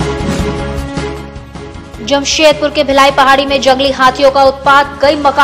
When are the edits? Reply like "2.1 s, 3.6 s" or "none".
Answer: 1.0 s